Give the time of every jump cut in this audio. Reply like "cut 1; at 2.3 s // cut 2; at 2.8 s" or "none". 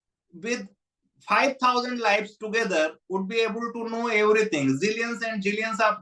none